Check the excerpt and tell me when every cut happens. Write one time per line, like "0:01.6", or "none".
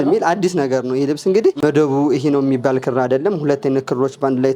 0:01.6